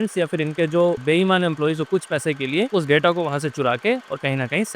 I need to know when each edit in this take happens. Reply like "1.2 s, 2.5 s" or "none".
1.0 s, 2.7 s

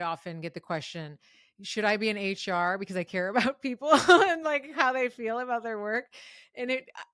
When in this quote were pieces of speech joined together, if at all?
none

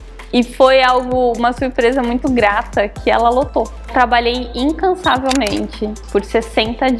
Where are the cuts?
none

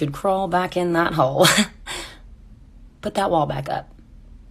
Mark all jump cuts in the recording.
2.4 s

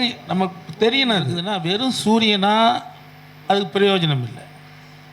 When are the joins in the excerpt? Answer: 1.4 s

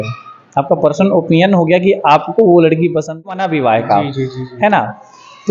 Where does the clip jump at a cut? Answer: 3.4 s

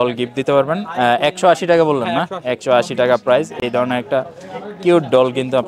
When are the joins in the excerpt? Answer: none

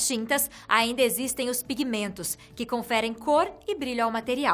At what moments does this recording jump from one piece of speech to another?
none

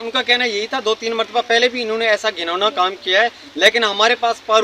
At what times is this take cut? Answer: none

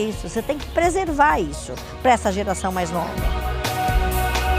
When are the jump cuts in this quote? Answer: 3.2 s

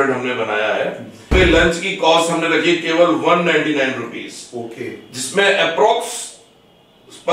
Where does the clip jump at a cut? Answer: 1.2 s

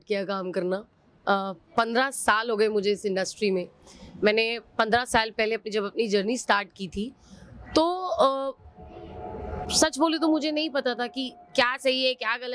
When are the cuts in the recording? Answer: none

